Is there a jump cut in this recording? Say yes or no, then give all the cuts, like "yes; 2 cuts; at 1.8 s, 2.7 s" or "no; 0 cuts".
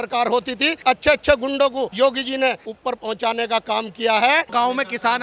yes; 4 cuts; at 0.8 s, 1.9 s, 2.7 s, 4.5 s